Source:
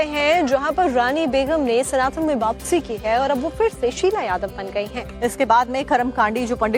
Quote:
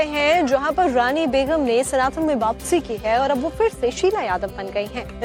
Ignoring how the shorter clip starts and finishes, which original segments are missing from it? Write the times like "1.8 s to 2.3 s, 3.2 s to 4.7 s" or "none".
none